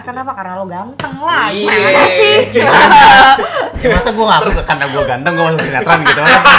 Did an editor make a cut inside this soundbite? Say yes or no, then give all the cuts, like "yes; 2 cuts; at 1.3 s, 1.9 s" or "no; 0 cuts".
no; 0 cuts